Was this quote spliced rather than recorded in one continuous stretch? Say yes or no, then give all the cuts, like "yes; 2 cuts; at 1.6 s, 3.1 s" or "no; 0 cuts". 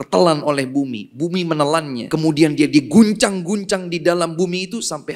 yes; 1 cut; at 2.0 s